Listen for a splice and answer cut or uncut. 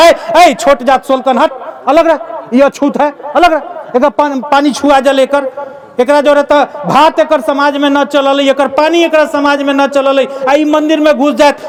uncut